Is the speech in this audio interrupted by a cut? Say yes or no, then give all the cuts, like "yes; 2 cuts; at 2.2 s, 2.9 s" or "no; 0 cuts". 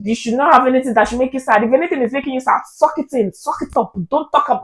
no; 0 cuts